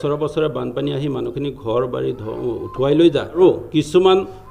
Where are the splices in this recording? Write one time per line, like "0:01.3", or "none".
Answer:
0:03.4